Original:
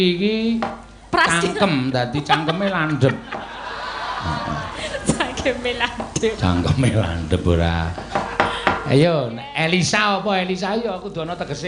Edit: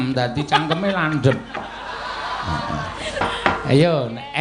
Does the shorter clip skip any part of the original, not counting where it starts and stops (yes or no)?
yes